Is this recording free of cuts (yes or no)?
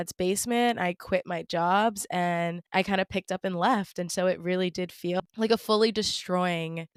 yes